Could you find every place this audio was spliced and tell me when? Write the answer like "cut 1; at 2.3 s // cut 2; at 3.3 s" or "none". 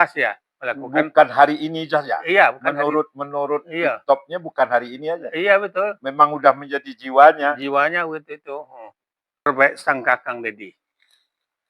cut 1; at 9.4 s

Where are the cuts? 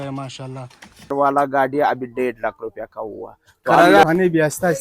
cut 1; at 1.1 s // cut 2; at 4.0 s

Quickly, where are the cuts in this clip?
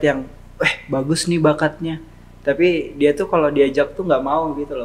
none

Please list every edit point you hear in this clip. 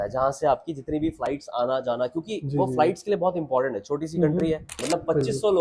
cut 1; at 4.7 s

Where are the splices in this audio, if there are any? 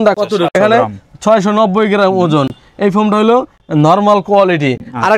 none

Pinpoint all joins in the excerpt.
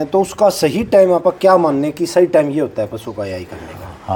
none

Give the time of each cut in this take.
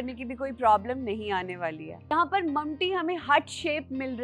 cut 1; at 2.1 s

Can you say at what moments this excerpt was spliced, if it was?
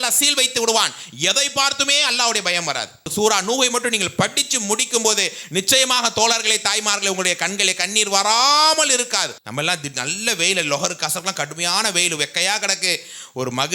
cut 1; at 3.1 s // cut 2; at 9.4 s

